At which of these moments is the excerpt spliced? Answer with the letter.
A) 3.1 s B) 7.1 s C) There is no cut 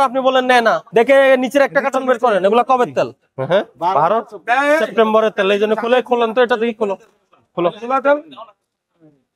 A